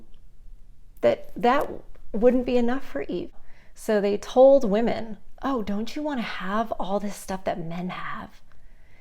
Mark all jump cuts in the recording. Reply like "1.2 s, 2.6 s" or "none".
3.2 s